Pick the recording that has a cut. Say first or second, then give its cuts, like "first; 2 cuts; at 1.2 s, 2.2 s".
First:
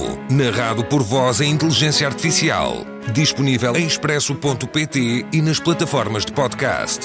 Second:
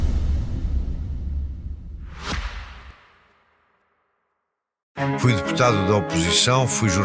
second; 1 cut; at 2.0 s